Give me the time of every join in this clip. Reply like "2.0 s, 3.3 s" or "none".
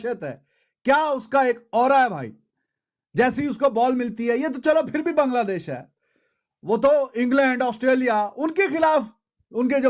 none